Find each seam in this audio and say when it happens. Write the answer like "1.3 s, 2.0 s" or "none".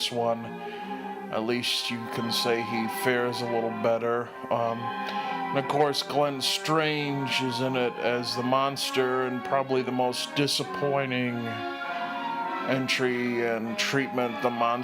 6.5 s